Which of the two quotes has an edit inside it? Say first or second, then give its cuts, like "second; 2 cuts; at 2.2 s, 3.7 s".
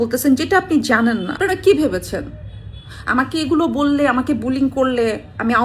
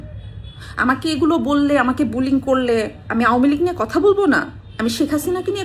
first; 1 cut; at 1.3 s